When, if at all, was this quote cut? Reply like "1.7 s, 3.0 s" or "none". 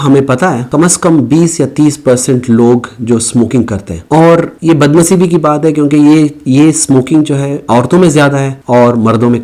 none